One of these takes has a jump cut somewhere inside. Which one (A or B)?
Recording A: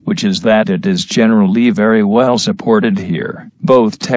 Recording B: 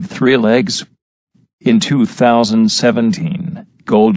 A